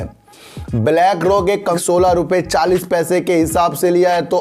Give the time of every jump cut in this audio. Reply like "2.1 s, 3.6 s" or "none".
1.8 s